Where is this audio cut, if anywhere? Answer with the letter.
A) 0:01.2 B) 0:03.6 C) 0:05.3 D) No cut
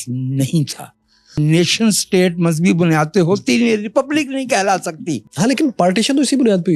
A